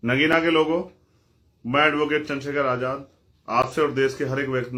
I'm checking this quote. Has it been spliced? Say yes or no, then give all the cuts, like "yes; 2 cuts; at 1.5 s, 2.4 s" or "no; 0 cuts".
no; 0 cuts